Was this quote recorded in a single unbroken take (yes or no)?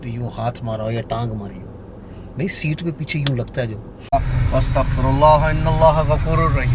no